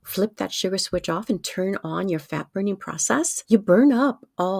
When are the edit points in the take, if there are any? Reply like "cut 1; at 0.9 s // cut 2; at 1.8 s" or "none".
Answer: cut 1; at 3.4 s